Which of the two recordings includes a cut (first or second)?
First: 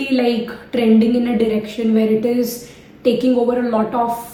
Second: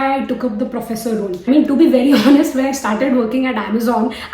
second